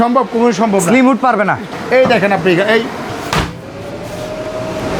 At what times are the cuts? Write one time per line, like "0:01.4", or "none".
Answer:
0:01.7
0:03.1